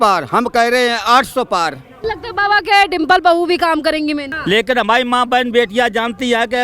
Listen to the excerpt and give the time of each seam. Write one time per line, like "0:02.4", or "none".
0:01.9
0:04.3